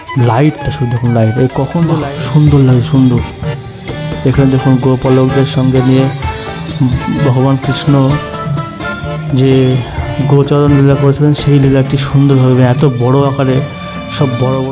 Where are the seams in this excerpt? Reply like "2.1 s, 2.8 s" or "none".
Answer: 1.9 s

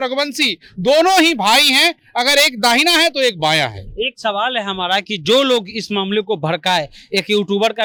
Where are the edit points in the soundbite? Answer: none

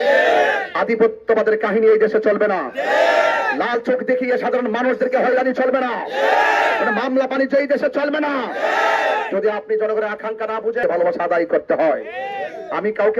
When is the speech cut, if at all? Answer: 10.8 s

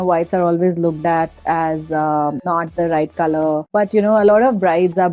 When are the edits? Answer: 2.4 s, 3.6 s

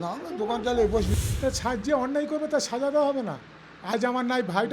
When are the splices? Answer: 1.1 s

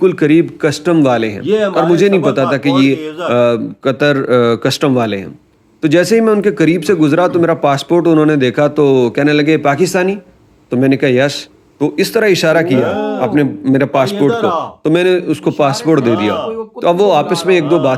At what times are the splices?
none

